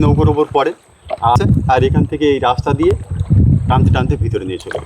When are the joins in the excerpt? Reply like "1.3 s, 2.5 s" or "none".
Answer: 1.4 s